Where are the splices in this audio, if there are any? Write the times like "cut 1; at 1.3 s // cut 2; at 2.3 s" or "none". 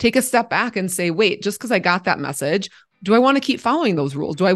cut 1; at 2.8 s